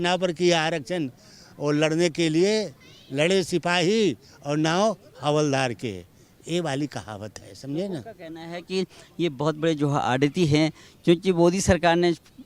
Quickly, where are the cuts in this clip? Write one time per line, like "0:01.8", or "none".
none